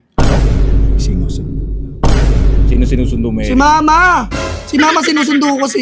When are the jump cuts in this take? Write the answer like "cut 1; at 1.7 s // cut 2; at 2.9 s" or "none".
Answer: none